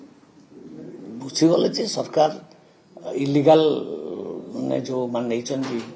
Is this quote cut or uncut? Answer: uncut